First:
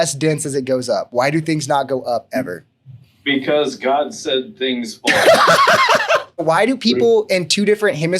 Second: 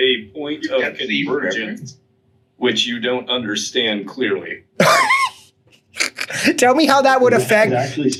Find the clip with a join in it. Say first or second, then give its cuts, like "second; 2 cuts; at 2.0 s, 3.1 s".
first; 1 cut; at 6.4 s